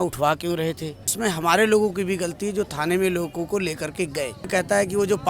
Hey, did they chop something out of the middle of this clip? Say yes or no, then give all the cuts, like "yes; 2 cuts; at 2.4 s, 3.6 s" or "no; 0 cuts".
yes; 2 cuts; at 1.1 s, 4.5 s